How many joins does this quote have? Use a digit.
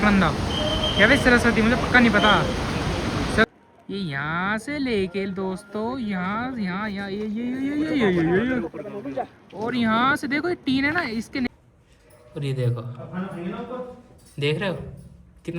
2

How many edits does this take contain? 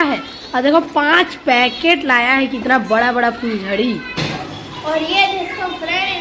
1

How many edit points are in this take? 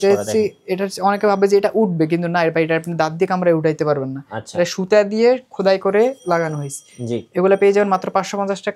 0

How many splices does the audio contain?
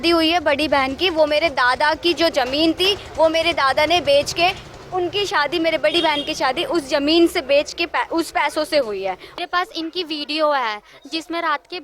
1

